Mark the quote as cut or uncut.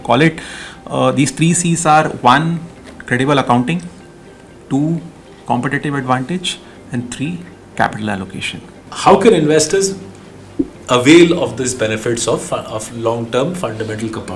cut